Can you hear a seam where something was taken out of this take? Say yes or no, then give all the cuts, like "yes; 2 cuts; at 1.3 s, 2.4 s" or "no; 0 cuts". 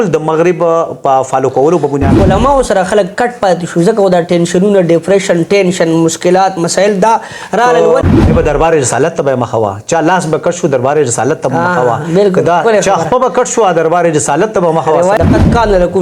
yes; 3 cuts; at 2.2 s, 8.0 s, 15.2 s